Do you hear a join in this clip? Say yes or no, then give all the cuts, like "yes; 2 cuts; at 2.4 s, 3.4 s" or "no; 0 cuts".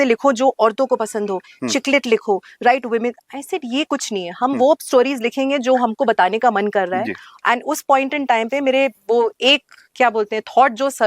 no; 0 cuts